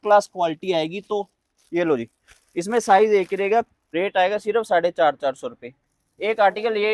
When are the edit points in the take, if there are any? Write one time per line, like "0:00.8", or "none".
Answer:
0:03.8